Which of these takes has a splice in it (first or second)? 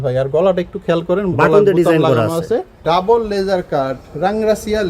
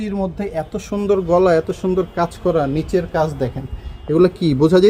first